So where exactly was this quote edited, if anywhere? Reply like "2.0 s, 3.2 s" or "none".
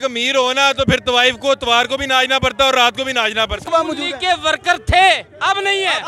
3.6 s